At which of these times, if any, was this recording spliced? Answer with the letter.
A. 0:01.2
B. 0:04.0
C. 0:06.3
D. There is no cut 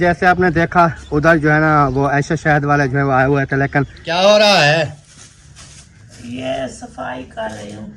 B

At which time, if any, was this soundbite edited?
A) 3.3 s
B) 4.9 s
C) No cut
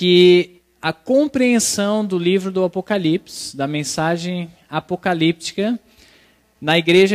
B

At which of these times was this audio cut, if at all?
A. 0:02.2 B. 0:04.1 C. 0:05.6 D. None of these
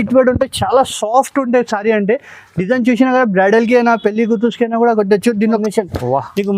C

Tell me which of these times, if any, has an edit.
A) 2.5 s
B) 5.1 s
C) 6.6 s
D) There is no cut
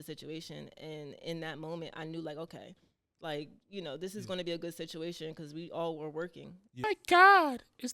C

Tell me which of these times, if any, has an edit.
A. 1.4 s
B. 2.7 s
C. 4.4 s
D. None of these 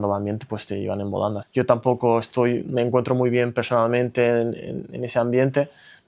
A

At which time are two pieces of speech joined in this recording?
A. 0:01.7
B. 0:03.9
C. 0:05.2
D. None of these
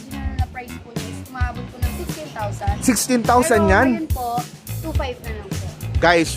D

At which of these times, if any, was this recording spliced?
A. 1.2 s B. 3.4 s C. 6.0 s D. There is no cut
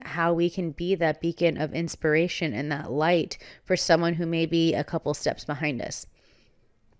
D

